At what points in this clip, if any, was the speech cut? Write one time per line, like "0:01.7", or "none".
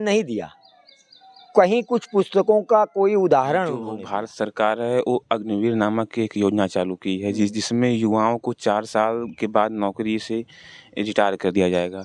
0:04.0